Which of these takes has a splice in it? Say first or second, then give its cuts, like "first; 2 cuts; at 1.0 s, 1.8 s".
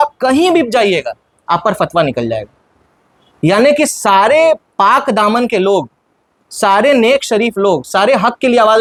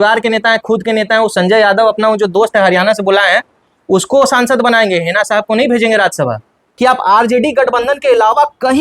second; 1 cut; at 6.6 s